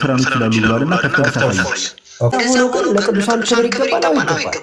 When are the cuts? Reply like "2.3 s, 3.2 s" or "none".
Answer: 2.3 s